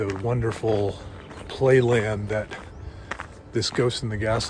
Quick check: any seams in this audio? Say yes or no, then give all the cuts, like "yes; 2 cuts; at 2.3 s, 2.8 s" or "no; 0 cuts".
no; 0 cuts